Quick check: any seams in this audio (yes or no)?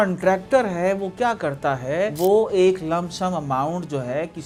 no